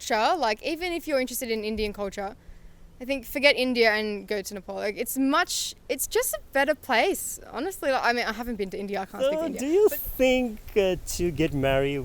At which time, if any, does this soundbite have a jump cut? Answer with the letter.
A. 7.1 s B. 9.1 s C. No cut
B